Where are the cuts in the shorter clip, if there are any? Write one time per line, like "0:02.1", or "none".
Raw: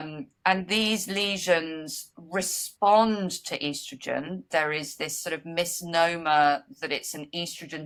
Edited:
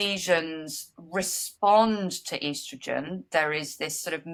none